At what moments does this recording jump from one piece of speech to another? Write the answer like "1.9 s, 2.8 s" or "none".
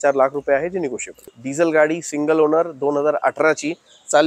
1.3 s